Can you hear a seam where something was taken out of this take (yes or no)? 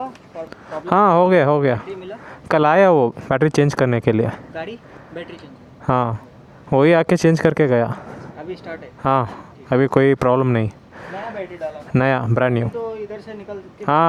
no